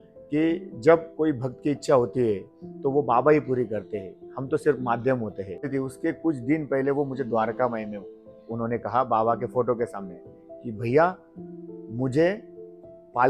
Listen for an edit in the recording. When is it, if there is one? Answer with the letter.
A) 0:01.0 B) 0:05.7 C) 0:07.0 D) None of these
B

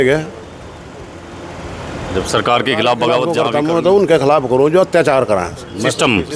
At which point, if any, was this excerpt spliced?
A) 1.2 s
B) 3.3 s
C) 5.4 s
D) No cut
B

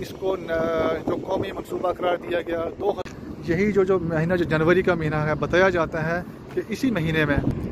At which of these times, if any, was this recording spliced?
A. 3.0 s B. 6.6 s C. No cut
A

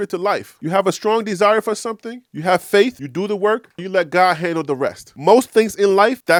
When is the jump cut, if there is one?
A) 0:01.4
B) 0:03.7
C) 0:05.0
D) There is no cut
D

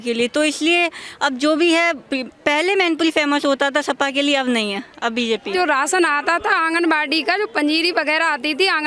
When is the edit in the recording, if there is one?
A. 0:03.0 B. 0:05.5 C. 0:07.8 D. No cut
B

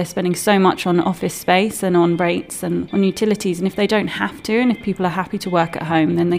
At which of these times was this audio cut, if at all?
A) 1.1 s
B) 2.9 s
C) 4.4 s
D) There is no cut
B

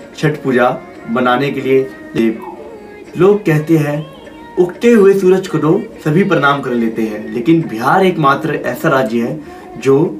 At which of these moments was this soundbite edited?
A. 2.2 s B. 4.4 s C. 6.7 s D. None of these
A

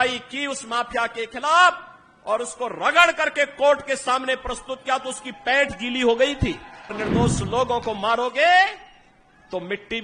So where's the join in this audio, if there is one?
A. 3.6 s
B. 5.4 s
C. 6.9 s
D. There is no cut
C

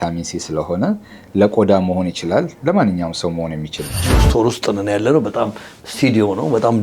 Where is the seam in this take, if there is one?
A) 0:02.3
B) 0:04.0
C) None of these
B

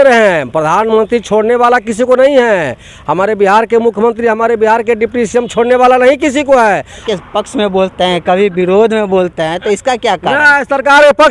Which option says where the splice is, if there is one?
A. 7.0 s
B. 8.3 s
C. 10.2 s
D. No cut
A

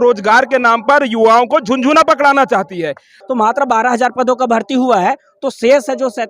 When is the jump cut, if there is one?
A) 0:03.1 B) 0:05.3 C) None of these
A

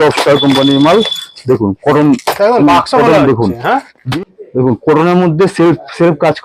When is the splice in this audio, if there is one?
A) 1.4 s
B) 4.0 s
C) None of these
B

